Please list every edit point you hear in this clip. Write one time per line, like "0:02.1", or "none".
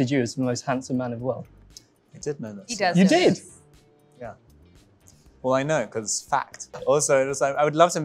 0:06.7